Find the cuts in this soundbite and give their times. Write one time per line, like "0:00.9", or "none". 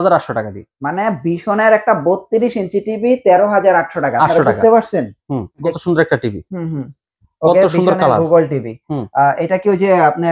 0:05.8